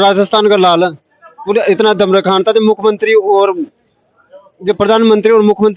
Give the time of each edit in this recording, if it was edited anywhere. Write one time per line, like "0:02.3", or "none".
none